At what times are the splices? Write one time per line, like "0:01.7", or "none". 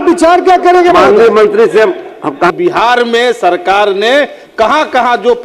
0:02.5